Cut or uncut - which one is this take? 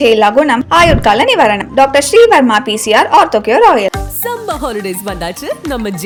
uncut